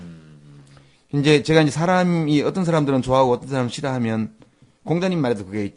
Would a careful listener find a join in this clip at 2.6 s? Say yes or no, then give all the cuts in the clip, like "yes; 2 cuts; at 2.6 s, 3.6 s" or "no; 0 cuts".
yes; 1 cut; at 2.6 s